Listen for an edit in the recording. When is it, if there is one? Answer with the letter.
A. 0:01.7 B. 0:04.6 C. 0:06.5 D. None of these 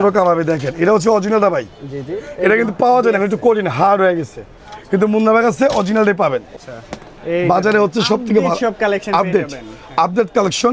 C